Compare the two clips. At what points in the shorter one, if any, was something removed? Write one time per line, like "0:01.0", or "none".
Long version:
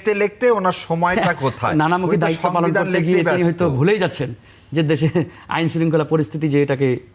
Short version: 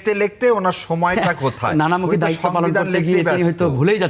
none